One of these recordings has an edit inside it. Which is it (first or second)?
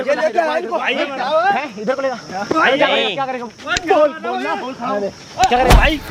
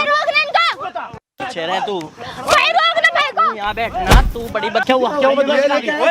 second